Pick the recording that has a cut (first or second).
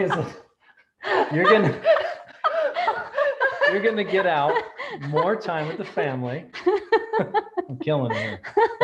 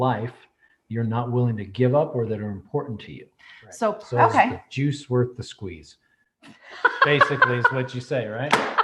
second